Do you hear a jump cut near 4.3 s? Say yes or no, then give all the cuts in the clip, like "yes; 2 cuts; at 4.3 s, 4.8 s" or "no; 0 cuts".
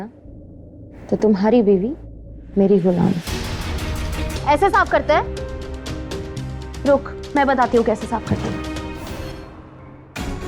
yes; 1 cut; at 4.3 s